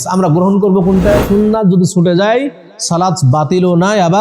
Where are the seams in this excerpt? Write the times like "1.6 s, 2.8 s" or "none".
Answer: 1.2 s